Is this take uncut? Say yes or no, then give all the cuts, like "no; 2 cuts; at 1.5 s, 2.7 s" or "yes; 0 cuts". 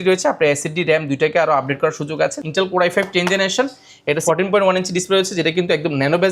no; 2 cuts; at 2.4 s, 4.2 s